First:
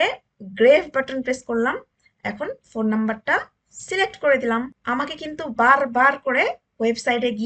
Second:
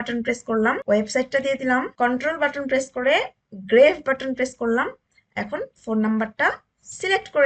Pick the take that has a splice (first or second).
second